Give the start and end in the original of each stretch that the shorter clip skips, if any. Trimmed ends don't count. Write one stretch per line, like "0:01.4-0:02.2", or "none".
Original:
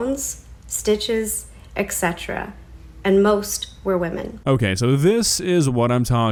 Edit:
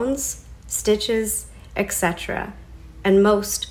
none

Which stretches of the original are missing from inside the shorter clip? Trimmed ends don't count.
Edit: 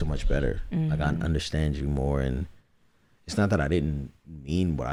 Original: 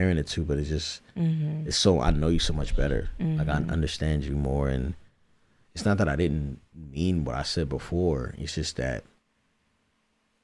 none

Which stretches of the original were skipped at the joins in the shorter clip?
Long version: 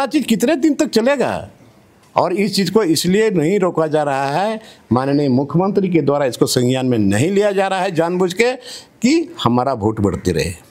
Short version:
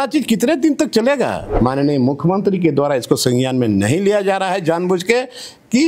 0:01.4-0:04.7

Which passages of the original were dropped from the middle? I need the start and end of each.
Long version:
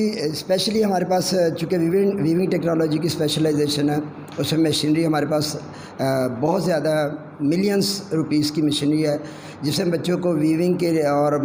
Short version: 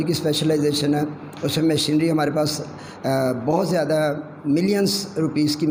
none

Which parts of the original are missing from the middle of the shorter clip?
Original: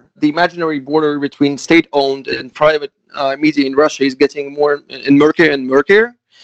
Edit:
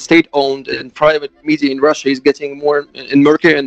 0:03.0-0:03.4

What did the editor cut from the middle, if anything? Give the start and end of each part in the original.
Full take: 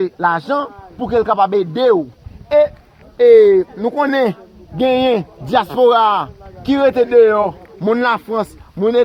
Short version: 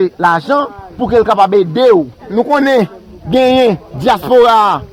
0:02.3-0:03.8

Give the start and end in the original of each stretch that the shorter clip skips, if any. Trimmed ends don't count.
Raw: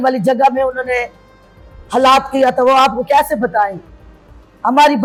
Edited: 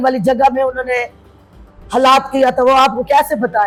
none

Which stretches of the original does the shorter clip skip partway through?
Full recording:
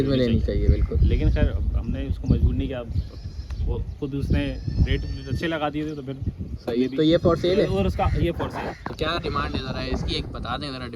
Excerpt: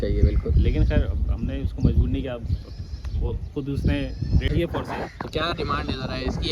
0:04.9-0:08.1

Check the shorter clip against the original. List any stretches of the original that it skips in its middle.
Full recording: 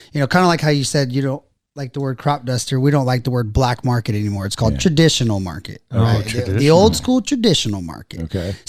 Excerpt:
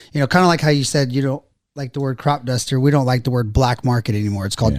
none

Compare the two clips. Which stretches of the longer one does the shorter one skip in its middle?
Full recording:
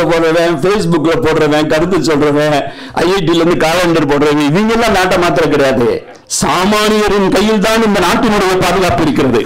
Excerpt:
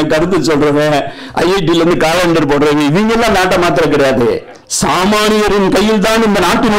none

